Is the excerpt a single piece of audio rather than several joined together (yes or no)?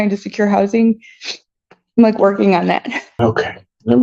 no